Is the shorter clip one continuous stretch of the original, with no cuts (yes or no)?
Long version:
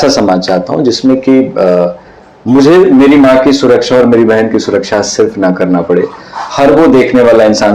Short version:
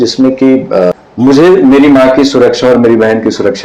no